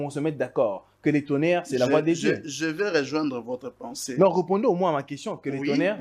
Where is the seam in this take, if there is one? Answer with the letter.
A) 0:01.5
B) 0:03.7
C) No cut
C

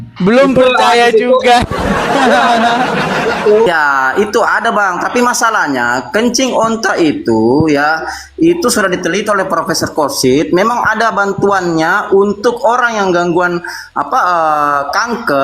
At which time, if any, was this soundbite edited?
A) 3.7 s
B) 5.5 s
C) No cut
A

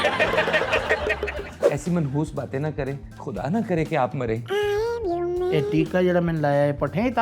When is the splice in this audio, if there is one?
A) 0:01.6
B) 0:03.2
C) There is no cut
A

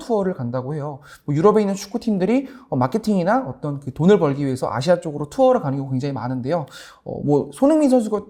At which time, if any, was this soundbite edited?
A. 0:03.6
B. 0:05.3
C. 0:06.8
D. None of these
D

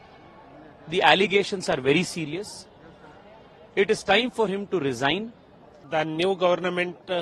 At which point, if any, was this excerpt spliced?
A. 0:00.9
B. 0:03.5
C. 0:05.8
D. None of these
C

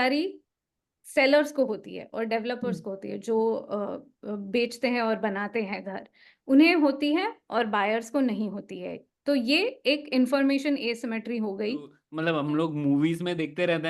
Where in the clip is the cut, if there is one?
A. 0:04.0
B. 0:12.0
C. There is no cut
B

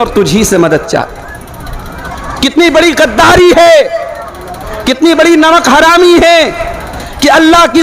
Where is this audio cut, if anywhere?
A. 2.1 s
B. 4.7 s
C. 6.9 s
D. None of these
A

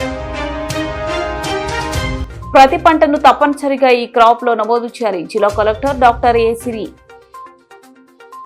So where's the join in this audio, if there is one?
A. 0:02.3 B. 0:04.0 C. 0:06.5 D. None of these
A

